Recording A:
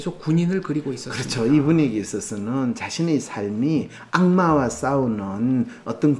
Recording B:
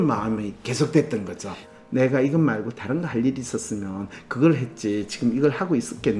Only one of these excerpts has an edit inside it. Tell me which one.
B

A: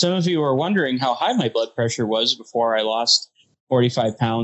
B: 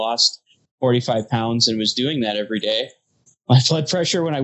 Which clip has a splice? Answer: B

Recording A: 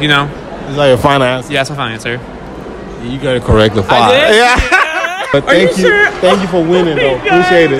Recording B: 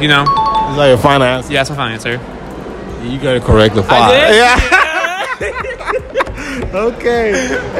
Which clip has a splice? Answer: A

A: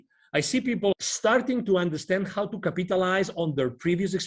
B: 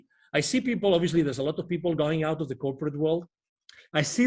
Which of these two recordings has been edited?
A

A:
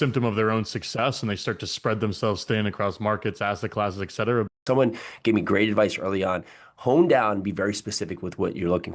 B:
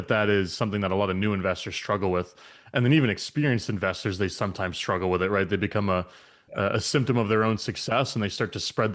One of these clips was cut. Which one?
A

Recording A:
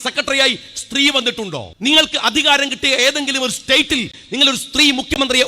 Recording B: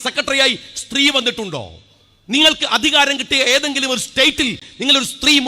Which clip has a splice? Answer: A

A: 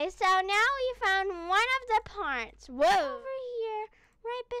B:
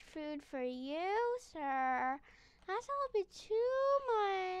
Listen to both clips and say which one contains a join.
A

